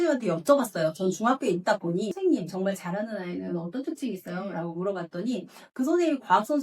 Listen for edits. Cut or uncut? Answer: cut